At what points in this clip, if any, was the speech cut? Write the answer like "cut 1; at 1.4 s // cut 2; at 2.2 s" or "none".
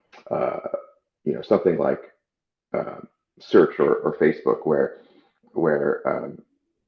none